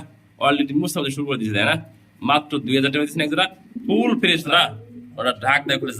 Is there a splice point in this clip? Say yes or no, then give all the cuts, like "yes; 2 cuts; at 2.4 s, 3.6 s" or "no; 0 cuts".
yes; 1 cut; at 4.4 s